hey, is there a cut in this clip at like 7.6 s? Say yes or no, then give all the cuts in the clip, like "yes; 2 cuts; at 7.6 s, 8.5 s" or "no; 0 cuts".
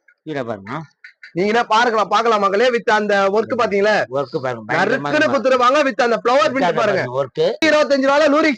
yes; 1 cut; at 7.6 s